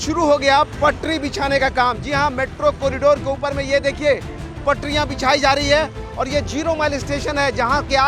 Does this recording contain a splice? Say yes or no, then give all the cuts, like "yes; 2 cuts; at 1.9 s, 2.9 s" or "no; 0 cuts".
no; 0 cuts